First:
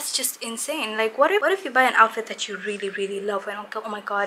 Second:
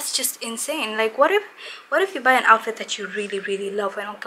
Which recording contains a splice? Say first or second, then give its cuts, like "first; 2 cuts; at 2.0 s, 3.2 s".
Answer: first; 1 cut; at 1.4 s